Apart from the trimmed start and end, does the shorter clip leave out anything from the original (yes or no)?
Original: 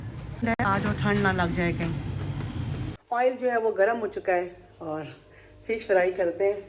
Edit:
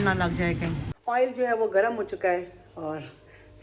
yes